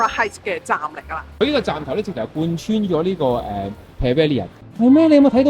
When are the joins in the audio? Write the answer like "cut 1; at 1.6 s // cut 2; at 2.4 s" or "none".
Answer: cut 1; at 4.5 s